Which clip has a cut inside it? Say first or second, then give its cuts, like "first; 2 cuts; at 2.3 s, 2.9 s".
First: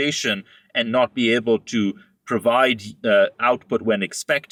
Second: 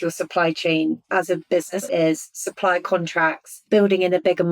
second; 2 cuts; at 1.8 s, 3.5 s